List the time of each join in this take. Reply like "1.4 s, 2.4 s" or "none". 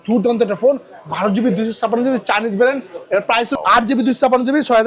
3.5 s